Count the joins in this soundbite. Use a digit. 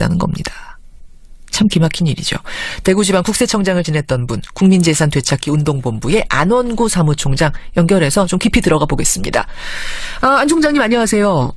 0